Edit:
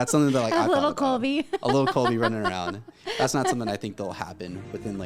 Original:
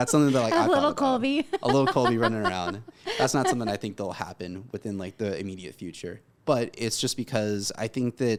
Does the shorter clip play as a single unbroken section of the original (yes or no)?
yes